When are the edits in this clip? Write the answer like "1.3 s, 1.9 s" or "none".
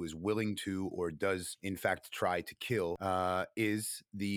1.5 s, 3.0 s